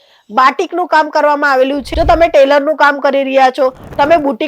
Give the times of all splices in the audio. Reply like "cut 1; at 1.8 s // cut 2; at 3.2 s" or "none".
cut 1; at 1.8 s

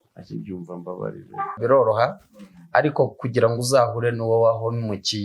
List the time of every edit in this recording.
cut 1; at 1.6 s

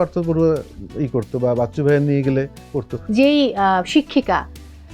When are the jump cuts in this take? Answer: cut 1; at 3.0 s

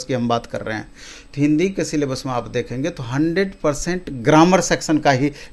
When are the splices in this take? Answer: none

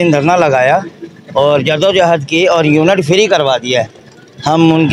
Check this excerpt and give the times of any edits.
none

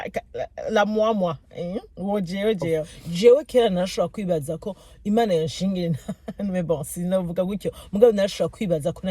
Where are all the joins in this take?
cut 1; at 3.0 s

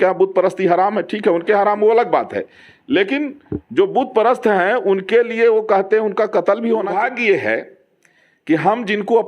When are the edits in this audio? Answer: cut 1; at 6.9 s

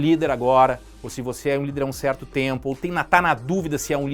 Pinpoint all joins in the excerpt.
none

